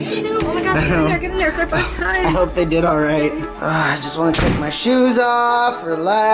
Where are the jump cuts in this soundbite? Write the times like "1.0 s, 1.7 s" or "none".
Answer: 3.5 s